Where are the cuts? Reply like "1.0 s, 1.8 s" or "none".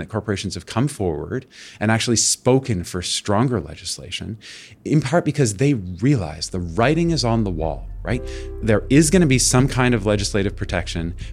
none